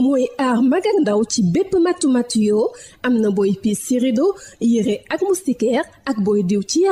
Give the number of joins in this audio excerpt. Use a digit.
0